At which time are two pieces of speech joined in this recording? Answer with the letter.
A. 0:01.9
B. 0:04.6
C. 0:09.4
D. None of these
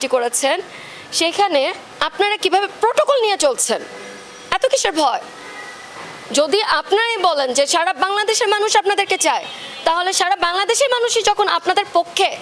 A